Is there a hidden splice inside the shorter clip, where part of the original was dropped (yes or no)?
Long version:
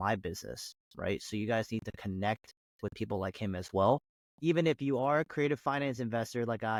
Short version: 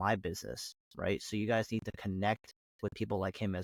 no